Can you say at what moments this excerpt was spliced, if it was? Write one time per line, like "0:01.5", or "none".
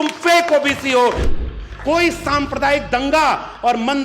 0:01.3